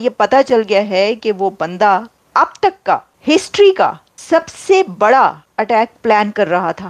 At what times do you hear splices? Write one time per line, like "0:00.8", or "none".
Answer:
0:02.2
0:03.1
0:04.1
0:05.5